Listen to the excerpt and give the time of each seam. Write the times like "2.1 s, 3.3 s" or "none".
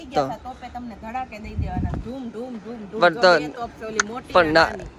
none